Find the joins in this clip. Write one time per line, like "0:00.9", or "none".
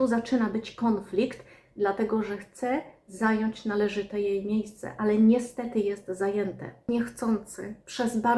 0:06.9